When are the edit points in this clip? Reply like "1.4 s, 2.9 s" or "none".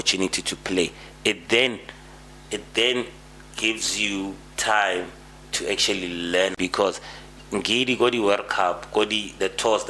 6.5 s